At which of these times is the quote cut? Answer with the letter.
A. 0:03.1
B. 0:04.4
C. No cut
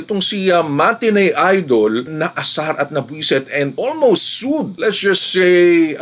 C